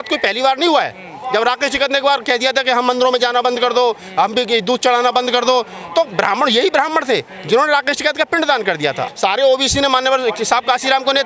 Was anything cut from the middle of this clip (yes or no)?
yes